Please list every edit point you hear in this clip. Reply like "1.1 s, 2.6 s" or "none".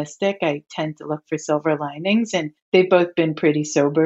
2.6 s